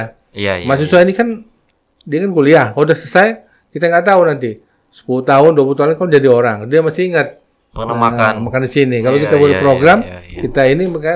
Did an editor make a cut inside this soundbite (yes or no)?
no